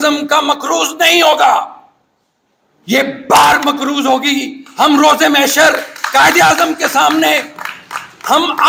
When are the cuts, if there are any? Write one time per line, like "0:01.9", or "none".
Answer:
none